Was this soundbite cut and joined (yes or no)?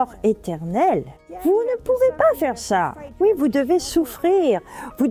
no